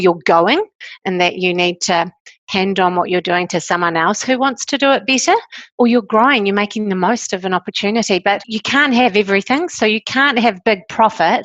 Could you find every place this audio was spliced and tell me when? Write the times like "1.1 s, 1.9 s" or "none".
5.6 s, 8.5 s

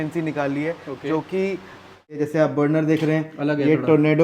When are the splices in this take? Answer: 2.2 s

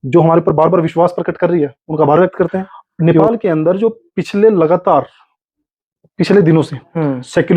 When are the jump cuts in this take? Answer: 3.1 s

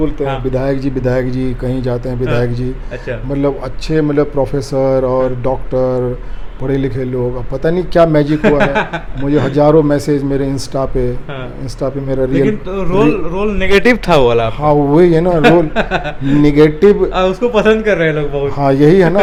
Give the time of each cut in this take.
none

